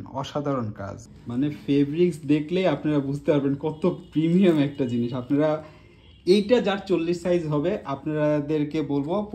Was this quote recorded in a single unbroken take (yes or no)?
yes